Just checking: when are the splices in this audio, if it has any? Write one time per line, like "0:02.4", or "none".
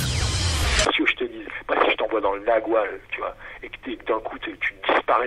none